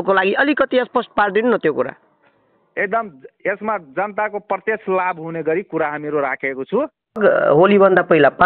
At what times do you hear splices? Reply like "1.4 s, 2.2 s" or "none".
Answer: 7.2 s